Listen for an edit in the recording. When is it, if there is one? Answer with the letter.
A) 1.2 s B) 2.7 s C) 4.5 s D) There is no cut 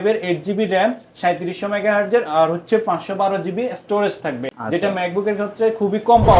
C